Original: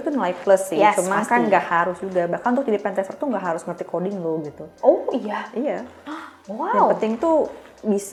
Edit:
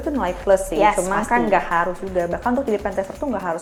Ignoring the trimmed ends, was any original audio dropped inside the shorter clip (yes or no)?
no